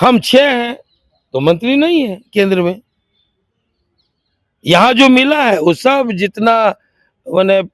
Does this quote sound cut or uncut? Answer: uncut